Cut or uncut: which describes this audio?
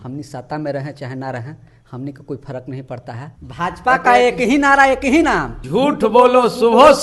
cut